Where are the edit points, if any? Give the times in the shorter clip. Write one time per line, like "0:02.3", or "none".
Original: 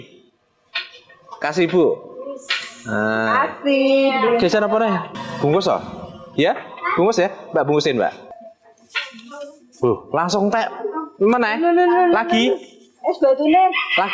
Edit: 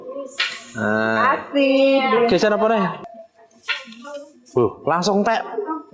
0:03.1